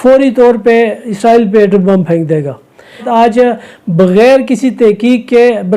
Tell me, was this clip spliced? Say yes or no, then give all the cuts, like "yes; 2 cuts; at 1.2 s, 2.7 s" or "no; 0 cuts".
yes; 1 cut; at 3.1 s